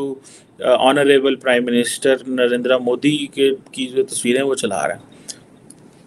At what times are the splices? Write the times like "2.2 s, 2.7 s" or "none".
none